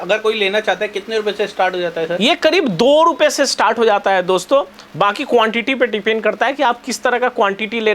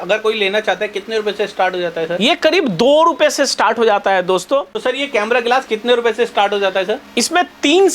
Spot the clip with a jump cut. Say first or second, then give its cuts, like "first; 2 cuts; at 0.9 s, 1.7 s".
second; 1 cut; at 4.7 s